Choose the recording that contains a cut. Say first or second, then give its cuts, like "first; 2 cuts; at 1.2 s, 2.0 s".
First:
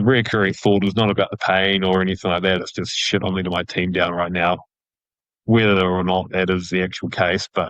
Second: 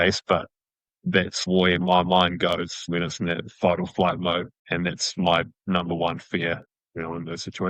second; 4 cuts; at 1.4 s, 2.9 s, 4.6 s, 6.7 s